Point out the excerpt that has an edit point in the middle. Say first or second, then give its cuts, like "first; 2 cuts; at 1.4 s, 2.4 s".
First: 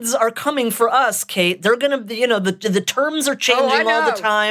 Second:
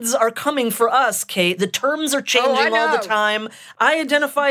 second; 2 cuts; at 1.6 s, 3.6 s